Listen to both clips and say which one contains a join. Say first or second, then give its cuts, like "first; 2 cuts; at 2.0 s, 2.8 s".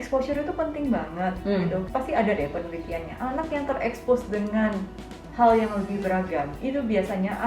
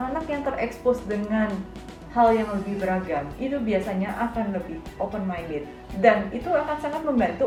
first; 1 cut; at 1.9 s